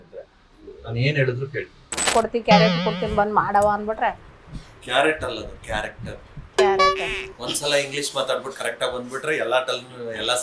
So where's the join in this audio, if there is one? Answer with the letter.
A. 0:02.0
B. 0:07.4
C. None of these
A